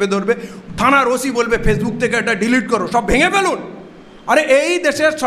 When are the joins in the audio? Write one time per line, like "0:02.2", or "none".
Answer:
none